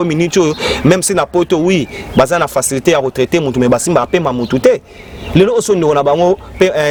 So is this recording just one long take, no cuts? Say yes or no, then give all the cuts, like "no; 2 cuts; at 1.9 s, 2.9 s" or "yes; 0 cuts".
yes; 0 cuts